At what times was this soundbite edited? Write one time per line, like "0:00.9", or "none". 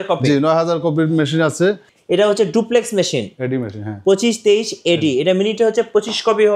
0:01.9